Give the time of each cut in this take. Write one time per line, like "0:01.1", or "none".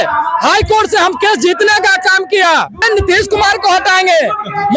0:02.8